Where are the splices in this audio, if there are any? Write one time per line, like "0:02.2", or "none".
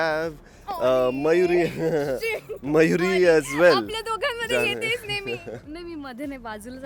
none